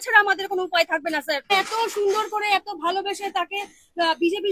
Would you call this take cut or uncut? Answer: cut